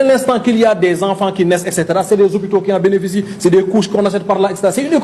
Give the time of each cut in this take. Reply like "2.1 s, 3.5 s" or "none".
none